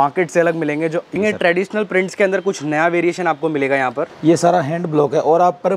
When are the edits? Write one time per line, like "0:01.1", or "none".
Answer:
0:01.1
0:04.1

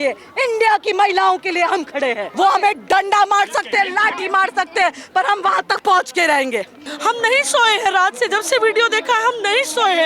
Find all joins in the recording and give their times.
0:02.2
0:06.8

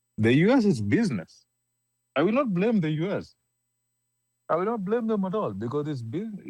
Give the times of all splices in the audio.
none

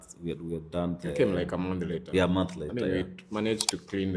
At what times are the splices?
none

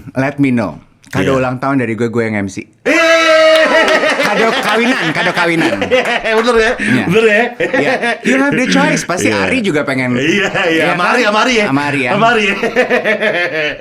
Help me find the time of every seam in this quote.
none

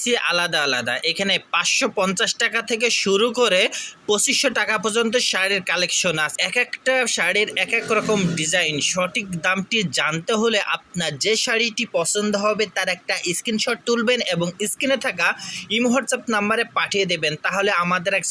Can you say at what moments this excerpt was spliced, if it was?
0:06.3

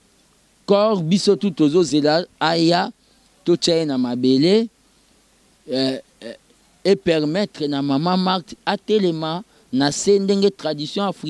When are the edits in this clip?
none

